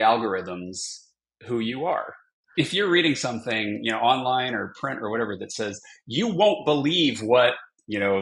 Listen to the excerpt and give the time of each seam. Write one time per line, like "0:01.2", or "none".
0:02.4